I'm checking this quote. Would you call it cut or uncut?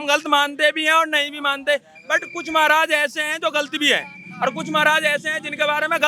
uncut